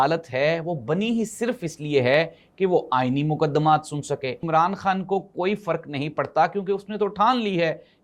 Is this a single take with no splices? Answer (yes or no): no